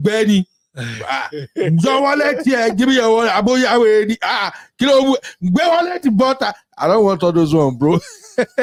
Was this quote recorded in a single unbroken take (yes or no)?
yes